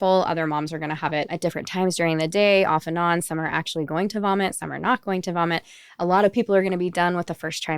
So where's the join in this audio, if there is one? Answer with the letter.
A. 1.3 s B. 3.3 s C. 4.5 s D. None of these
A